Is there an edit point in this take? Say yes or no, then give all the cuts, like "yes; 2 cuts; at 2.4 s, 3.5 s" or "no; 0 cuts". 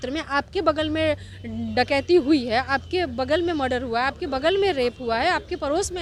no; 0 cuts